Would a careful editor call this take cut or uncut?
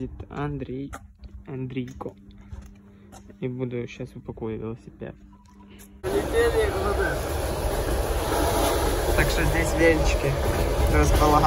cut